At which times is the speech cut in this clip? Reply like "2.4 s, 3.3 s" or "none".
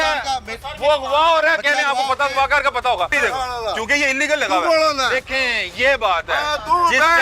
3.1 s